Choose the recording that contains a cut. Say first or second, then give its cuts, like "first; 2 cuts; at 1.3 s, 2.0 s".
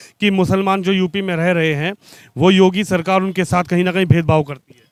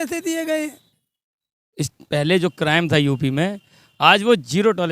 second; 1 cut; at 0.9 s